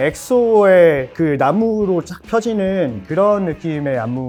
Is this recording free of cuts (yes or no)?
yes